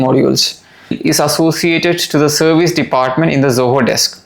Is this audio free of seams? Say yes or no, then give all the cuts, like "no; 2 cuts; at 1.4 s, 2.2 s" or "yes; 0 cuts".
no; 1 cut; at 1.0 s